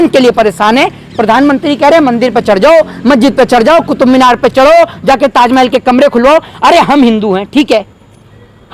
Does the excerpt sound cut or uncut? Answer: uncut